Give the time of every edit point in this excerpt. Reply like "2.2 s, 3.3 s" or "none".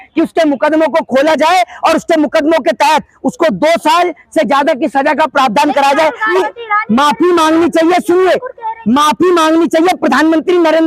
6.3 s